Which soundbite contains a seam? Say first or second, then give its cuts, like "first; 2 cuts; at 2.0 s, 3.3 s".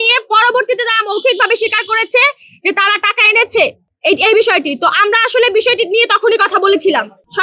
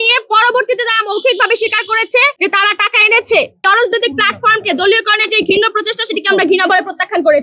second; 2 cuts; at 2.3 s, 3.6 s